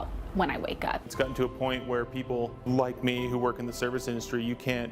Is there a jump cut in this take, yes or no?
yes